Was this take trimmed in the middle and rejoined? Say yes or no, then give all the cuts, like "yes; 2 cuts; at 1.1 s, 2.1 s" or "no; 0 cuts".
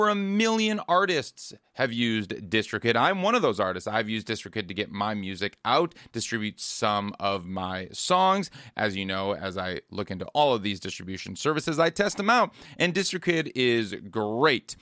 no; 0 cuts